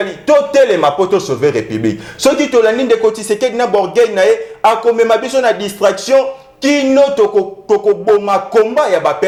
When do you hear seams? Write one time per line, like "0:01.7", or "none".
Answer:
none